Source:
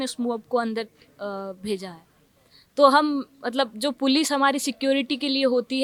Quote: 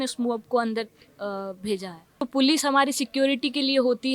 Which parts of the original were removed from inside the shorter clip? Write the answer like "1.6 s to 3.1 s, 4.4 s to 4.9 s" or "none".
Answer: 2.2 s to 3.8 s